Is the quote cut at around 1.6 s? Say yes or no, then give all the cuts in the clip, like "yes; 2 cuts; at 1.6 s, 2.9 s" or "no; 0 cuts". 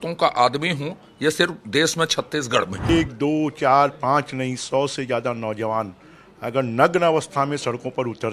no; 1 cut; at 2.9 s